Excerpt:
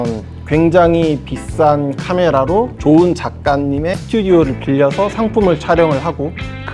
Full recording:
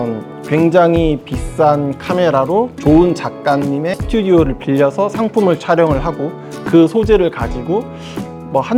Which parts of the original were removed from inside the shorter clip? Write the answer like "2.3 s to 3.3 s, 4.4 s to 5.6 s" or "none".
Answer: none